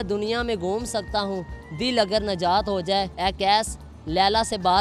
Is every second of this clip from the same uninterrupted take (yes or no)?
no